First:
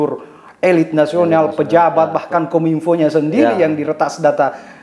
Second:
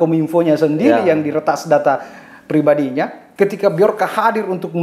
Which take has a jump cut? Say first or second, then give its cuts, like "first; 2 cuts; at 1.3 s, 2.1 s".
second; 1 cut; at 3.2 s